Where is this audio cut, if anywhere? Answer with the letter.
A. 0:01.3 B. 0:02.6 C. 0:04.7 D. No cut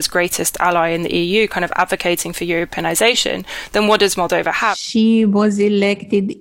C